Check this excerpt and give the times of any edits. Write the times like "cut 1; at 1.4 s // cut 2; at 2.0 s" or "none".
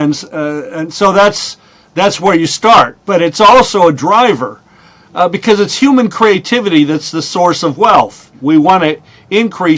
cut 1; at 8.2 s